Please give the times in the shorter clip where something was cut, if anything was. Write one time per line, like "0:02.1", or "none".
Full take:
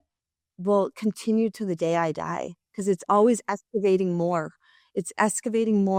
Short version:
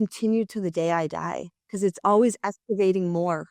none